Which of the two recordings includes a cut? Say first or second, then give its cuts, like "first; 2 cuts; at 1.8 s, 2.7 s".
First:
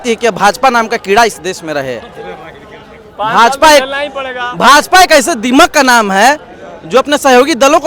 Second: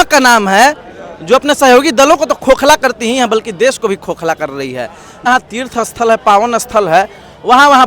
second; 1 cut; at 5.3 s